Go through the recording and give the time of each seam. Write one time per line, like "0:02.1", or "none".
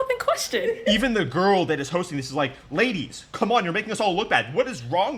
none